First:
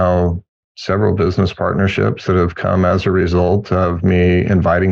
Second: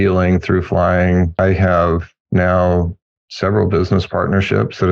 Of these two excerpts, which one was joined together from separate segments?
second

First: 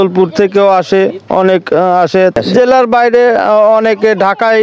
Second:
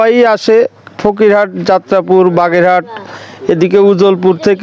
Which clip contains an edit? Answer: first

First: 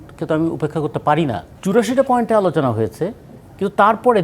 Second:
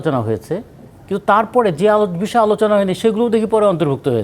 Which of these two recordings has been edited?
first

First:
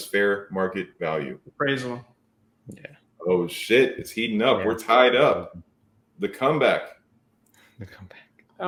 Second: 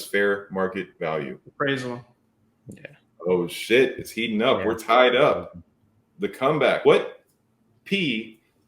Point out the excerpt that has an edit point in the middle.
second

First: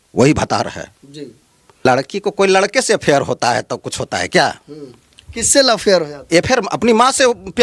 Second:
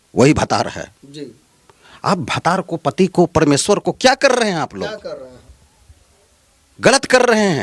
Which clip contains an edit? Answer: first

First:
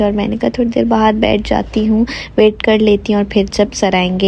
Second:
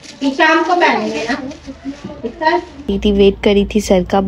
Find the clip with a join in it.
second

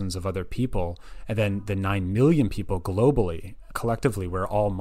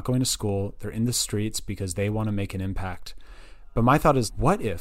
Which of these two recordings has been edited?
first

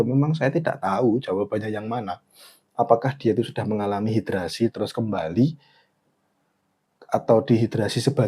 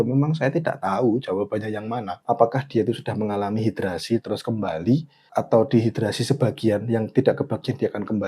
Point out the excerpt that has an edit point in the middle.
second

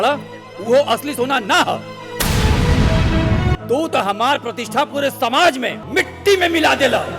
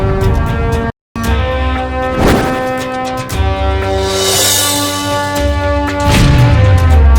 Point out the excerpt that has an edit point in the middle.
first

